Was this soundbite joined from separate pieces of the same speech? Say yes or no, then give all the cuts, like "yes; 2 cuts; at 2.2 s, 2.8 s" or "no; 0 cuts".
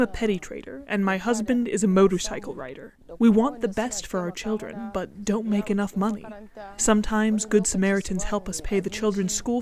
no; 0 cuts